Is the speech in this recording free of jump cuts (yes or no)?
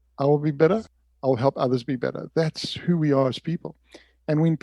no